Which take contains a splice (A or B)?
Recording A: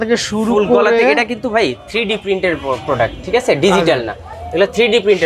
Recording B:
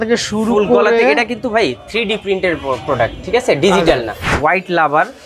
B